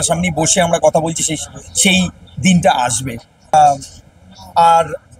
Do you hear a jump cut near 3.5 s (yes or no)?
yes